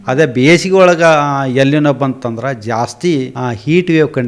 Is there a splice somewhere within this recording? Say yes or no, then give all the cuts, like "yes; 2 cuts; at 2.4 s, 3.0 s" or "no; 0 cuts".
yes; 1 cut; at 3.3 s